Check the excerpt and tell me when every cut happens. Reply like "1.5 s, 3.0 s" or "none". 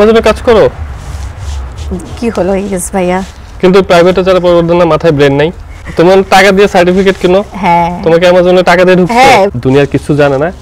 5.8 s, 9.5 s